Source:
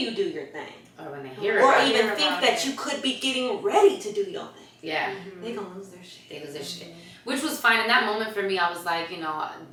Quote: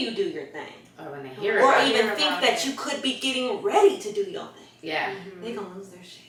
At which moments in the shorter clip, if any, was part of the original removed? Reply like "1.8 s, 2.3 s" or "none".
none